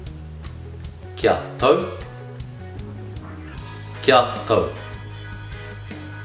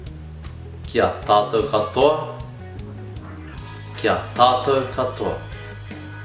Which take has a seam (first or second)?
second